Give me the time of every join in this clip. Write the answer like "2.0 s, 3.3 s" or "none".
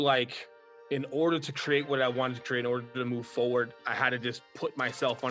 none